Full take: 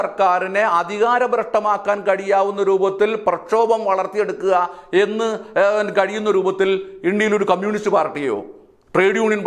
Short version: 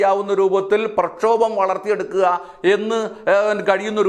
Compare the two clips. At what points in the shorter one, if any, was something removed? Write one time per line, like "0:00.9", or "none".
none